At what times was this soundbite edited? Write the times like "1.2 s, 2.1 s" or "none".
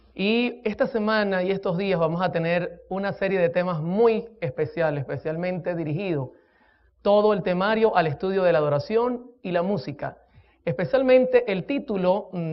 8.0 s